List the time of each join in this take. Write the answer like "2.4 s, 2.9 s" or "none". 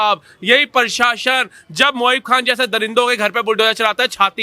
none